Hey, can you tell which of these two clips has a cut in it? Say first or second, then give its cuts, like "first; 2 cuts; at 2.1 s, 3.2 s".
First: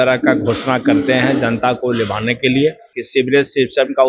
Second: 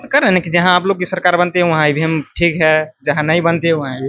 first; 1 cut; at 2.9 s